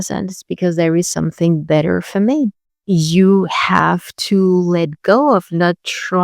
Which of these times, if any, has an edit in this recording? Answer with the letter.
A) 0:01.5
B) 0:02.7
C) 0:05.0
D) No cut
B